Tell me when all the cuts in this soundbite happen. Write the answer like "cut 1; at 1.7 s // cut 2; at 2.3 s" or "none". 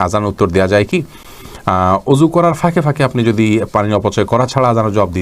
none